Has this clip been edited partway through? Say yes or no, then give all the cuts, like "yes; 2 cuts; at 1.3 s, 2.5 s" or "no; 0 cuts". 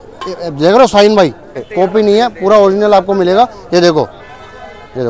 yes; 1 cut; at 1.7 s